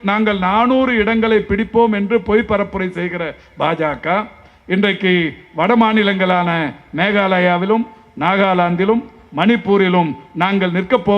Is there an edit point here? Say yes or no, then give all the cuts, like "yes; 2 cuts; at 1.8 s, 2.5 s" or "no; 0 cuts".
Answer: no; 0 cuts